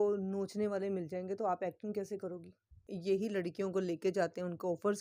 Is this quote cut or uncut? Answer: cut